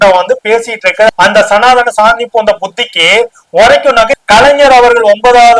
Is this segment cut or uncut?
cut